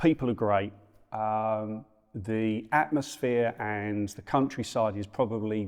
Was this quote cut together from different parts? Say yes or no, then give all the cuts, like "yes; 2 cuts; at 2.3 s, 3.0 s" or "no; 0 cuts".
no; 0 cuts